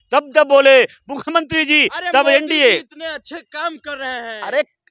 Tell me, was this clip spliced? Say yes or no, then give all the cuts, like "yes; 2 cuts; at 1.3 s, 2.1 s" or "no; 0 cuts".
no; 0 cuts